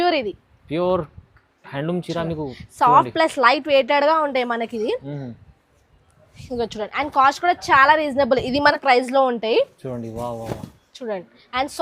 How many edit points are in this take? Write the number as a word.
one